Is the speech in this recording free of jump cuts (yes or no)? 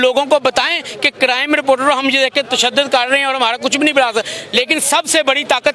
yes